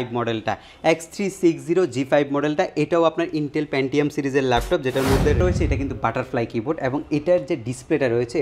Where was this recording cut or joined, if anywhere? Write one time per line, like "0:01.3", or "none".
0:05.4